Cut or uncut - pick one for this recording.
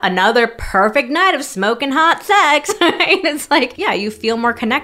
cut